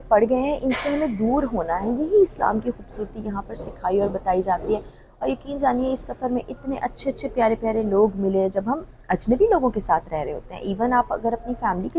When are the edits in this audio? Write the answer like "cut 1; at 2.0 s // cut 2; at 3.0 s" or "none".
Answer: none